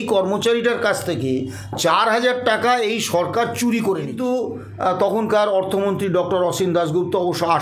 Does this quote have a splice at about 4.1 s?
yes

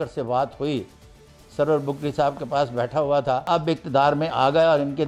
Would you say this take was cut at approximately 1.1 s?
no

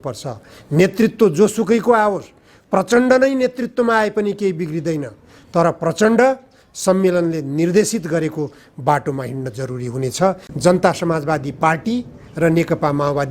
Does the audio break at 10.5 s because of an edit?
yes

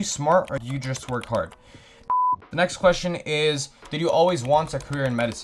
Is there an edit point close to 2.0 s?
yes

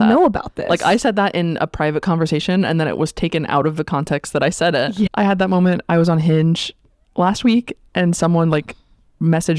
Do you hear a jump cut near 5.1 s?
yes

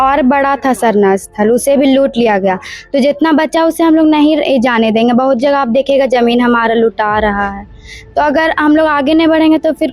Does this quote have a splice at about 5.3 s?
no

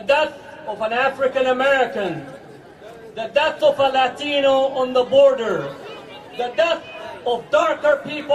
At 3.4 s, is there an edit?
yes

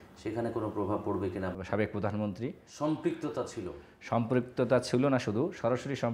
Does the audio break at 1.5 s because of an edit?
yes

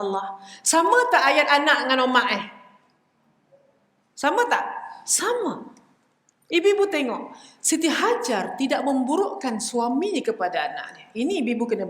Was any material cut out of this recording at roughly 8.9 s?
no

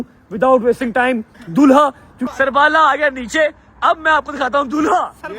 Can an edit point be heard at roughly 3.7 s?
no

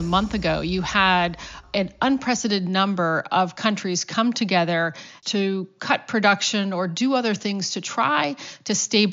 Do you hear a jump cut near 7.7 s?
no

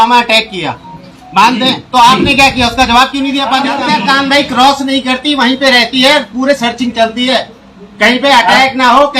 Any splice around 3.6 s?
yes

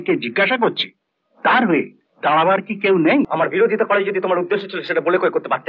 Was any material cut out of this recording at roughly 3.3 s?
yes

